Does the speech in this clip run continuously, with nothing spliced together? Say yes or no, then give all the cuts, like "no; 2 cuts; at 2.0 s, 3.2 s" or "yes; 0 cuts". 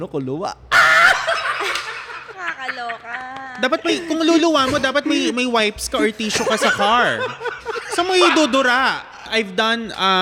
no; 2 cuts; at 2.2 s, 9.2 s